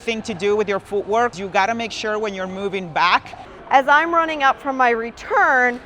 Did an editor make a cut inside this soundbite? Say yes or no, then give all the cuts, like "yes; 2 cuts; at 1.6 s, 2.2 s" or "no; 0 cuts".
yes; 2 cuts; at 1.3 s, 3.5 s